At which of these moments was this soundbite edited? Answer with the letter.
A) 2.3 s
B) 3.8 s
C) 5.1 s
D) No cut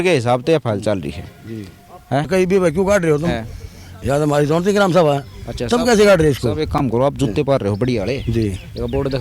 A